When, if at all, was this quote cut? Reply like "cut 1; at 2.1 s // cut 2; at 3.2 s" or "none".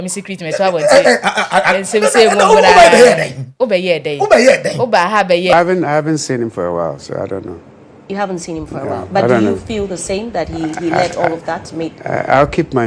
cut 1; at 5.5 s